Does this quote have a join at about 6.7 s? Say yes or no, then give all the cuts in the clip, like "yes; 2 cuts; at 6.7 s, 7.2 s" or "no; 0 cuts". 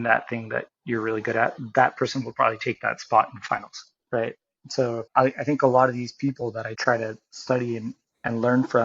yes; 2 cuts; at 5.0 s, 6.7 s